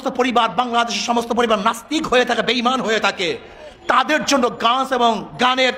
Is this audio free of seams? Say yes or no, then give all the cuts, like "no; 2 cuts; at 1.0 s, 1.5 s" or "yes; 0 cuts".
yes; 0 cuts